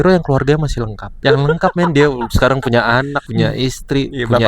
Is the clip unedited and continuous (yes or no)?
no